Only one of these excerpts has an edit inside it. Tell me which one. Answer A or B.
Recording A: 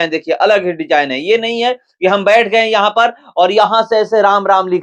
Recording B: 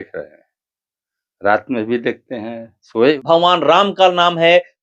B